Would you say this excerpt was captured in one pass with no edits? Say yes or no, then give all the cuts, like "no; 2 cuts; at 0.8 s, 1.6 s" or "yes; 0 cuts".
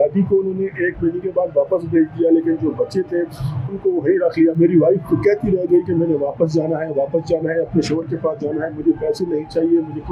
yes; 0 cuts